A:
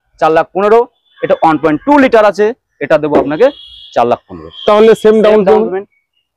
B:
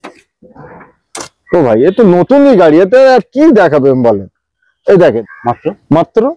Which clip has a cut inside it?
B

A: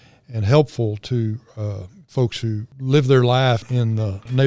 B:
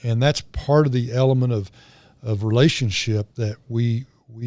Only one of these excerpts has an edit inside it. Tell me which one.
A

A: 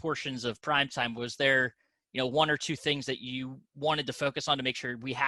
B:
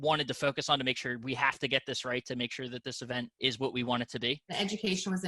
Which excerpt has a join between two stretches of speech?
B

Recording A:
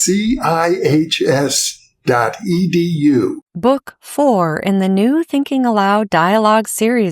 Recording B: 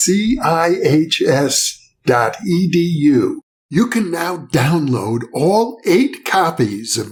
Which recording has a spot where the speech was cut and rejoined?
A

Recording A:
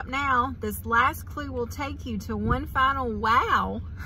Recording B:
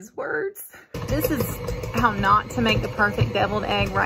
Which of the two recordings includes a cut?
B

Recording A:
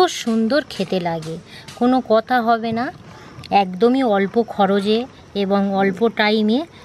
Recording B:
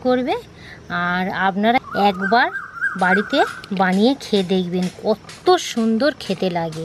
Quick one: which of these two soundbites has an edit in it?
B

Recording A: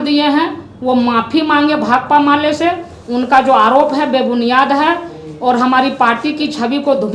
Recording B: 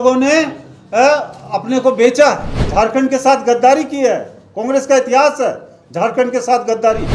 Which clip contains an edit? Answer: B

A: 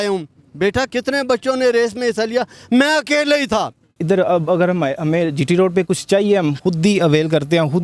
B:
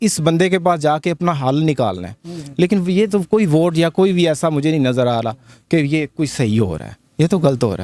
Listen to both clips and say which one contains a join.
A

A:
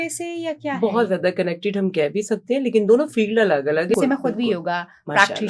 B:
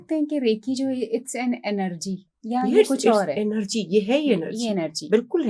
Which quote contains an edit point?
A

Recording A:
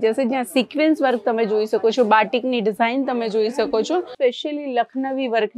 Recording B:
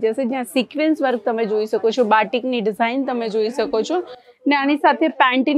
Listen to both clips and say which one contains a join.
A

